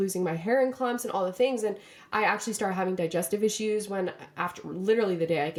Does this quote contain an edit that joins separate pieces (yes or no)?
no